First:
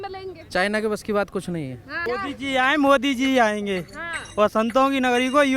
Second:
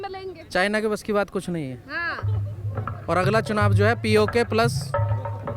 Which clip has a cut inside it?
first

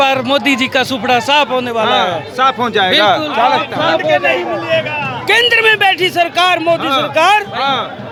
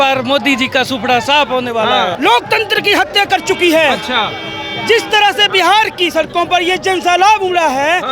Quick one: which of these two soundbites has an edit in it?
second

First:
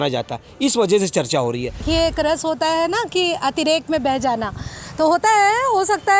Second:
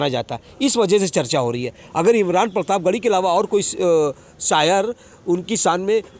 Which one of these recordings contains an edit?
first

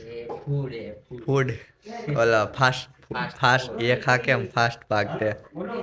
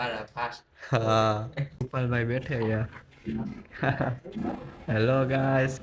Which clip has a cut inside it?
second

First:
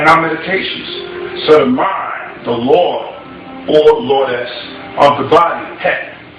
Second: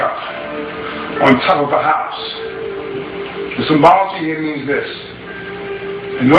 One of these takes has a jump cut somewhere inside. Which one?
second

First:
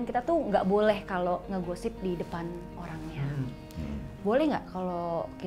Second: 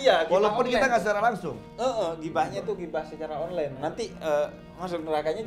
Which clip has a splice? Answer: second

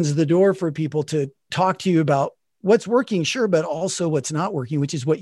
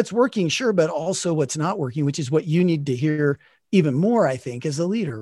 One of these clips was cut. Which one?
first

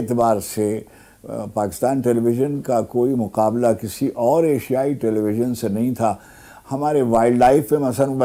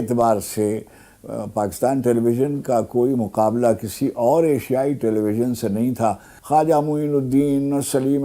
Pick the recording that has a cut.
second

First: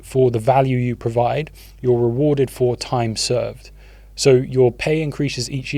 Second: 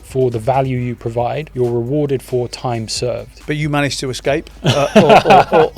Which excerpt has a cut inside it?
second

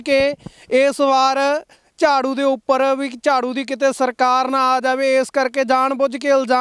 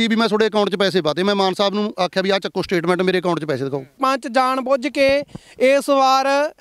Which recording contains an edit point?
second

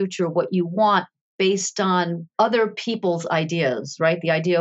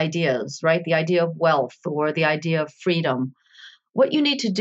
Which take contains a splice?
first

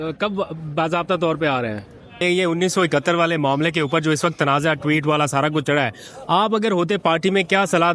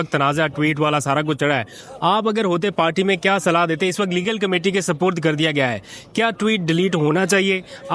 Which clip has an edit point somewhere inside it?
first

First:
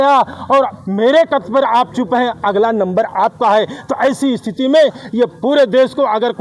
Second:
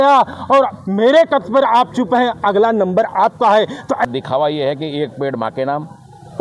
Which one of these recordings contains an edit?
second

